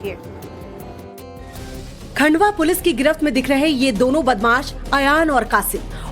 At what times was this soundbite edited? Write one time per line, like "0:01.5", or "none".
0:04.0